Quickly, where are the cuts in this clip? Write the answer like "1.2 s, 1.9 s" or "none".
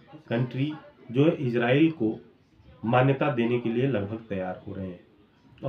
none